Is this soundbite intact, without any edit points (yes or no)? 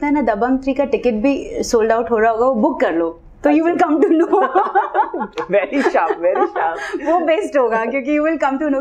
yes